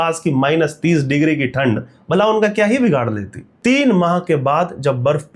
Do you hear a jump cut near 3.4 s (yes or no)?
yes